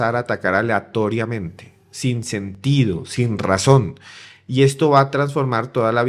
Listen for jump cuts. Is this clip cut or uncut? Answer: uncut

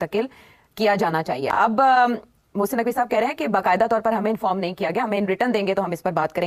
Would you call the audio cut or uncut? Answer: uncut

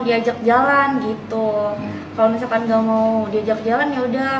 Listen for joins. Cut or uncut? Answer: uncut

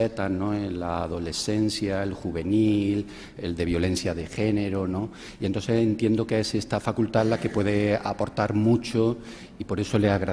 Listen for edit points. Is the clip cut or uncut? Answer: cut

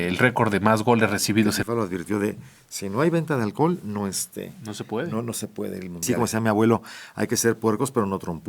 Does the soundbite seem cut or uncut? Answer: cut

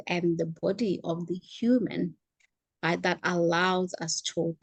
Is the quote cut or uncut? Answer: uncut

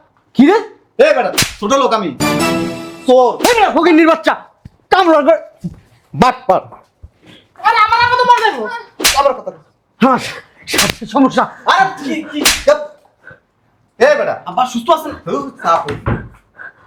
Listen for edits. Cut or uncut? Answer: uncut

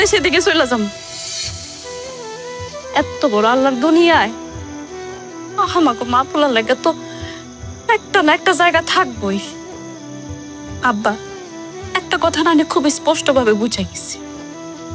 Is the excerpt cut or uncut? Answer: uncut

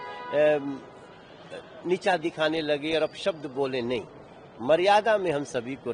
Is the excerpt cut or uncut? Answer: uncut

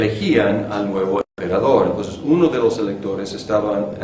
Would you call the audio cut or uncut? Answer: uncut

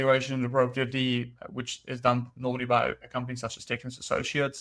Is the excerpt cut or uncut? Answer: uncut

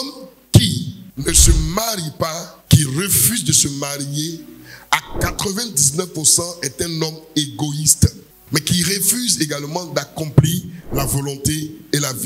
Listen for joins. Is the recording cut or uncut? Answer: uncut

